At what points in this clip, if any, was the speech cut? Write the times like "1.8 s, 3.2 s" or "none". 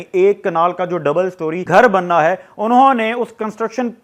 1.6 s